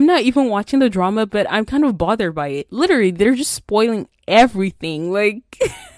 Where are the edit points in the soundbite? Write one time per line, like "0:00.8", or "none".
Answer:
none